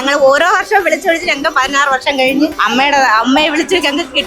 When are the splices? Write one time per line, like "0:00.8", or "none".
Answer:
0:02.6